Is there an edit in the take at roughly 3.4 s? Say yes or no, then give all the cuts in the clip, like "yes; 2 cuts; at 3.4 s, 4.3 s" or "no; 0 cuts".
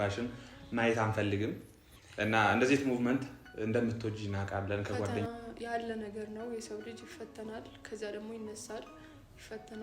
no; 1 cut; at 5.2 s